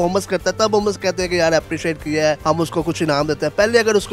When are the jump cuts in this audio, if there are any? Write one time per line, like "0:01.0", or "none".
0:02.4